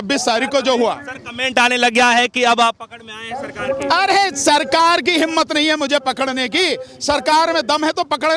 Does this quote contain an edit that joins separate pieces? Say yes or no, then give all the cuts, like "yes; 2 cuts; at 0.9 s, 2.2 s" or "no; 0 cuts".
no; 0 cuts